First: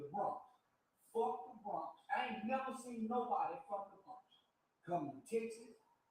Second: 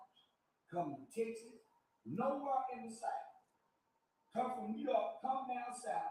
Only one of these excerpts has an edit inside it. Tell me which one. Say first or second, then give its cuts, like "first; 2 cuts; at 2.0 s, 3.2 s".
first; 1 cut; at 2.0 s